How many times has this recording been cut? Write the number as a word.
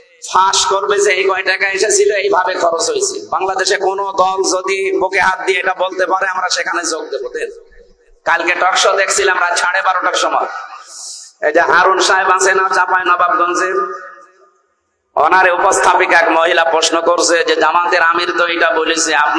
zero